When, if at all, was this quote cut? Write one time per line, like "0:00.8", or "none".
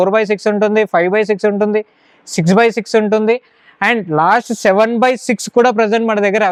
none